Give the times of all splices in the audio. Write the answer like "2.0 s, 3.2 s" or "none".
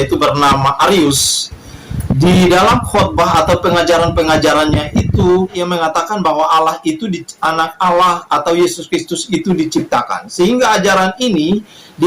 5.6 s